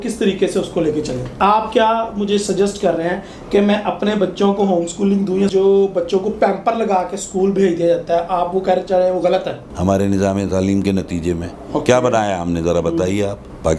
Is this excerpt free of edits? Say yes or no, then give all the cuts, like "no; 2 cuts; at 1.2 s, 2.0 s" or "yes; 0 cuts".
no; 3 cuts; at 1.4 s, 5.5 s, 9.7 s